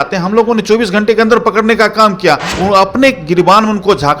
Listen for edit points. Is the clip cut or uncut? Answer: cut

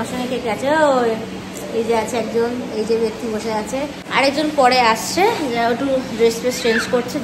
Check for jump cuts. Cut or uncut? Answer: uncut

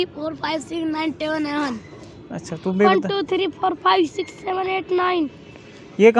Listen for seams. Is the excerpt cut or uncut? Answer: uncut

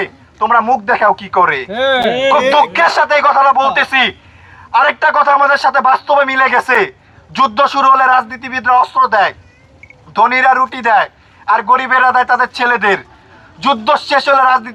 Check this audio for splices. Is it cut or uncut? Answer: uncut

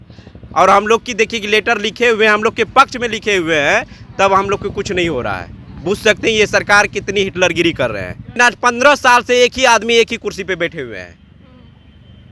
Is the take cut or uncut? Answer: cut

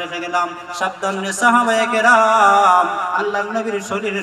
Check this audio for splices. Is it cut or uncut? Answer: cut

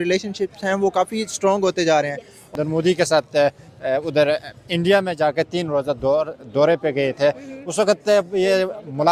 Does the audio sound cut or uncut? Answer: cut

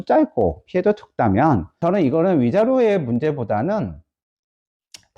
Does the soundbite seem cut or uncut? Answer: cut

